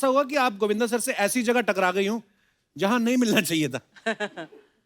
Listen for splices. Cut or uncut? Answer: uncut